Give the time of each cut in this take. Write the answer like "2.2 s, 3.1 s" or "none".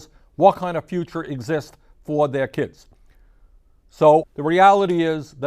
4.3 s